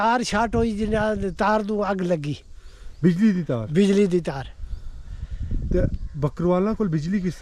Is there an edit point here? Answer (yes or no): no